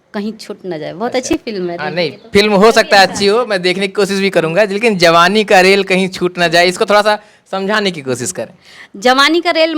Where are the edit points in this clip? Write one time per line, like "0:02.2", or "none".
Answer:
none